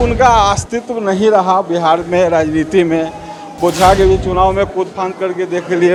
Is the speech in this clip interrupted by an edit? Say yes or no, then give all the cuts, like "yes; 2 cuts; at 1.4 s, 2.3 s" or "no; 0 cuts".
no; 0 cuts